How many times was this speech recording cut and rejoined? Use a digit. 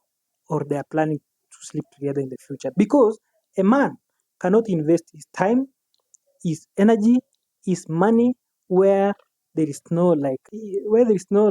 1